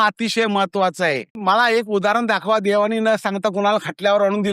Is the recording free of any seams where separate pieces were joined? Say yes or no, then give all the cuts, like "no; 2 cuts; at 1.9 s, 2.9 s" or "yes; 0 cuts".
no; 1 cut; at 1.4 s